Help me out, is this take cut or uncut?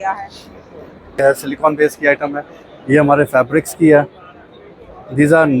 cut